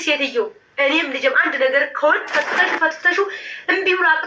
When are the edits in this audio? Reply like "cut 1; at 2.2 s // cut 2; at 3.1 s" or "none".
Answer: cut 1; at 2.3 s